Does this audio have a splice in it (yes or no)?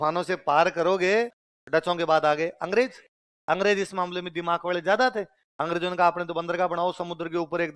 yes